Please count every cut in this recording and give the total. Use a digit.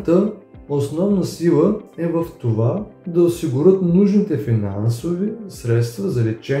0